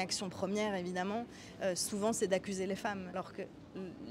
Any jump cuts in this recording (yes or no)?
yes